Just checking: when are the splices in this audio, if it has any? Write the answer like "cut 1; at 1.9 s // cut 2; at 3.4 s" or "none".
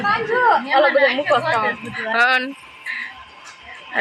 none